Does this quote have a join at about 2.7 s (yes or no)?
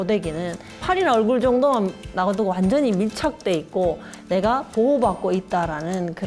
no